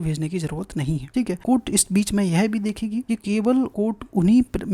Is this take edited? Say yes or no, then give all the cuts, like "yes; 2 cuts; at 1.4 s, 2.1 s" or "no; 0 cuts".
yes; 3 cuts; at 1.3 s, 3.1 s, 3.7 s